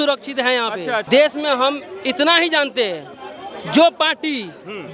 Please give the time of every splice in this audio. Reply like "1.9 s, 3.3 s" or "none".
1.0 s